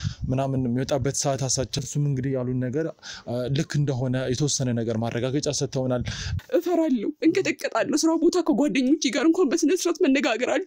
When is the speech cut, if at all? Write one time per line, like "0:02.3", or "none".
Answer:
0:01.9
0:06.4